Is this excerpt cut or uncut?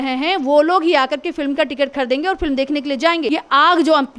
cut